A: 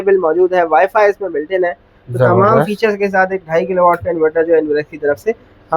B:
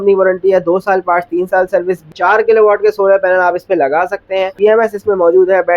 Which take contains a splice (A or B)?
B